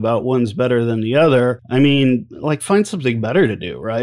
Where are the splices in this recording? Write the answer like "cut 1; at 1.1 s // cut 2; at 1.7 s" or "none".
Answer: cut 1; at 1.6 s // cut 2; at 2.3 s